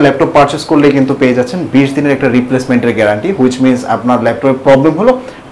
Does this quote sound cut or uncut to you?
uncut